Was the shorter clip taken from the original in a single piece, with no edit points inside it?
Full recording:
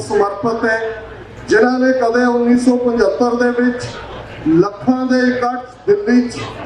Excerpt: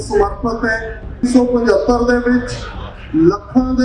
no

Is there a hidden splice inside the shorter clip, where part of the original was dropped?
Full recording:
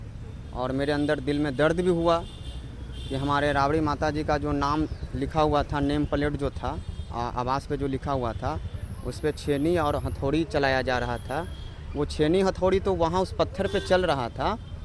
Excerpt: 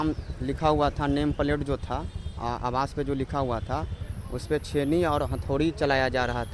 no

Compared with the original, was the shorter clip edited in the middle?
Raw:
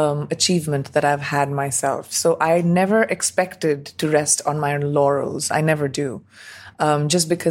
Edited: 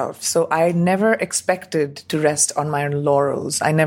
no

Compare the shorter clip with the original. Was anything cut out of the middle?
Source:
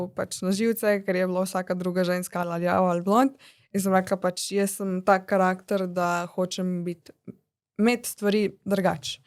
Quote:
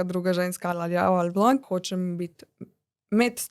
yes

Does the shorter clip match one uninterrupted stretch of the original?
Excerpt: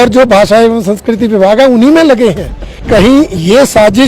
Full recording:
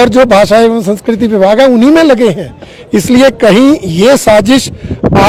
no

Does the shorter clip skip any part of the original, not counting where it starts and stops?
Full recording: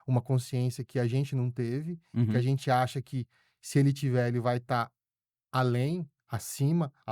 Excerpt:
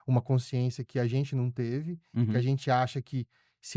no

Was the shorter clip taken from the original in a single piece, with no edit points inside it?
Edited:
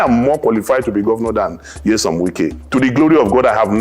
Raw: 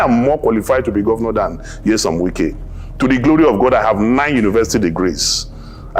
no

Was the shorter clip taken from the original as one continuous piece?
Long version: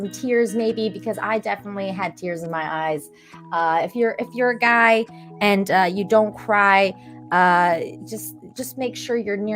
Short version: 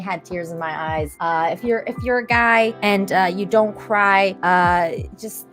no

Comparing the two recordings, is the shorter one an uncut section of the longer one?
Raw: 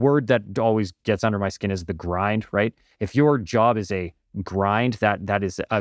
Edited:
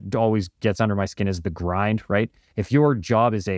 yes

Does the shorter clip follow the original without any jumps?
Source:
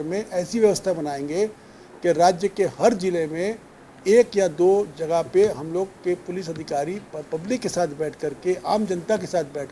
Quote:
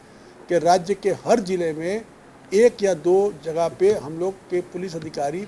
yes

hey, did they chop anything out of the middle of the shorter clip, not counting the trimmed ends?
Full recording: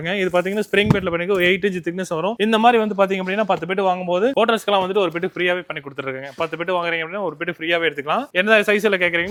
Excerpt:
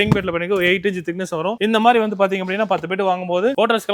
no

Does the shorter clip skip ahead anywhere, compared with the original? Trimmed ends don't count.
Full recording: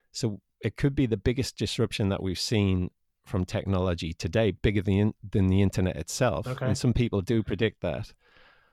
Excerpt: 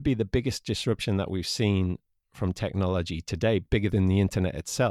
yes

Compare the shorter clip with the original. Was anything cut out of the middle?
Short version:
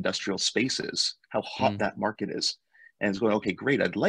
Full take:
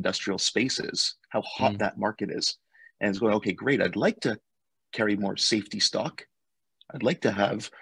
no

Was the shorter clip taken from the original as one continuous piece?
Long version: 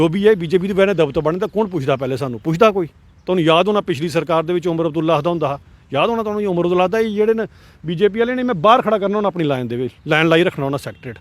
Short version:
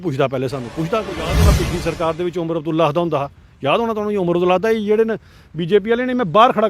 no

